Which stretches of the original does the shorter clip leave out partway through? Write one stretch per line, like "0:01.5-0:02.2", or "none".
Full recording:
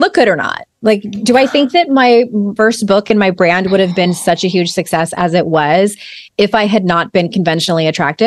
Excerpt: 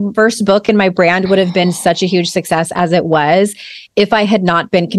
none